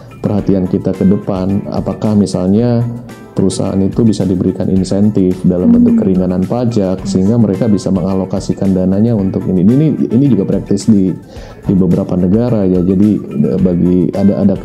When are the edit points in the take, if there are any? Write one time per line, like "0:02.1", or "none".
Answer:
none